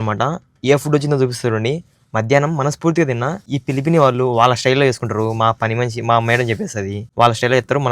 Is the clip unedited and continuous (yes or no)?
no